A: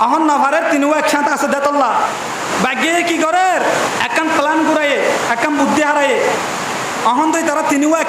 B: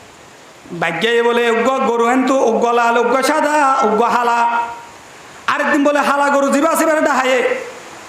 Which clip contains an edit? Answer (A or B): A